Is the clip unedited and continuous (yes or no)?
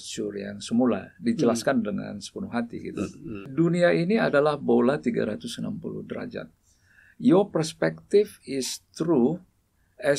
no